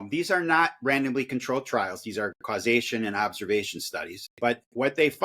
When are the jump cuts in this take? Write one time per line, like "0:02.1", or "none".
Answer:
0:04.2